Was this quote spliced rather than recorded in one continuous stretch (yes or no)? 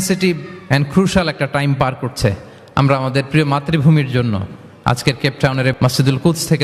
yes